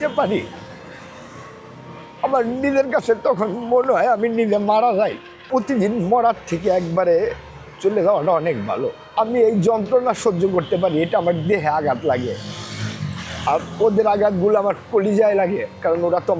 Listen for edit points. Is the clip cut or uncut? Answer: cut